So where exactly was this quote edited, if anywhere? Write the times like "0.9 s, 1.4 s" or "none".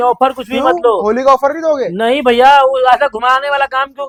none